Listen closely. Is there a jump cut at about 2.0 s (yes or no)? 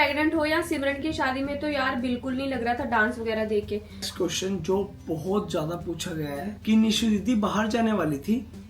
no